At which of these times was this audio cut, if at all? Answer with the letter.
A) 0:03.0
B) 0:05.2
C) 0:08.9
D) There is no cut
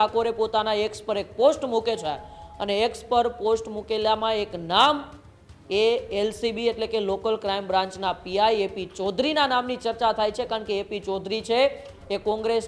D